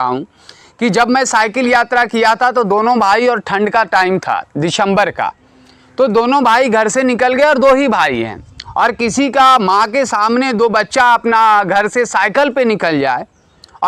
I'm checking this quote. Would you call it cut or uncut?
uncut